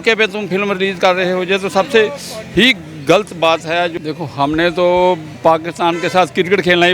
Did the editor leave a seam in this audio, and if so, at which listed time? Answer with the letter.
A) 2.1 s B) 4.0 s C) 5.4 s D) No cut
B